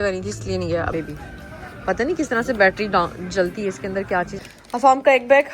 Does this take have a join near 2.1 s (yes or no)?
no